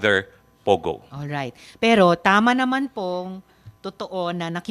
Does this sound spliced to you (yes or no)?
no